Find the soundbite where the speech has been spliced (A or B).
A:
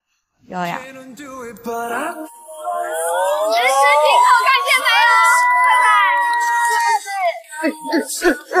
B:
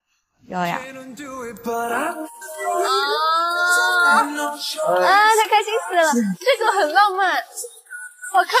B